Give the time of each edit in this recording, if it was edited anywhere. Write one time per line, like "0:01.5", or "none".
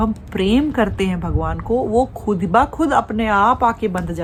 none